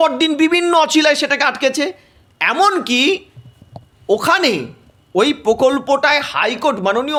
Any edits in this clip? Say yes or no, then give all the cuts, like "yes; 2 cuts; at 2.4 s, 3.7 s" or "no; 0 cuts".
no; 0 cuts